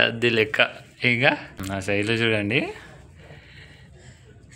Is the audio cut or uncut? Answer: cut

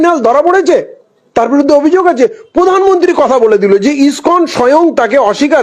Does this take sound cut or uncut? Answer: uncut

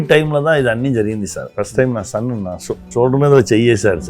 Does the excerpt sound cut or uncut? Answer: cut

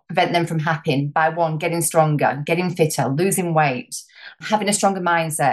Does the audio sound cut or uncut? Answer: cut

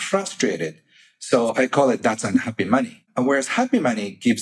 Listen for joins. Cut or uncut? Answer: cut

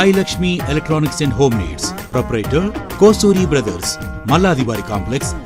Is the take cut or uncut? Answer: uncut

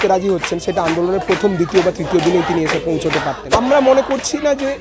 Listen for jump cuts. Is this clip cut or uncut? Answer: cut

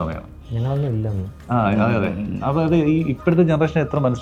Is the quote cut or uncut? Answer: uncut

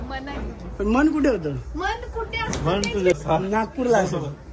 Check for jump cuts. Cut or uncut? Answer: cut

